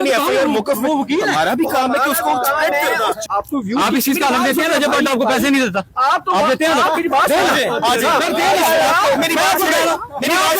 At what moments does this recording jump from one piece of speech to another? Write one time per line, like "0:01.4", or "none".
0:03.2